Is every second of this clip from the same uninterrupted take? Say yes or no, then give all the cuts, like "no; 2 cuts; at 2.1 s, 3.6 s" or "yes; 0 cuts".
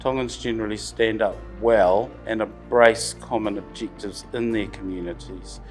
no; 2 cuts; at 1.5 s, 2.2 s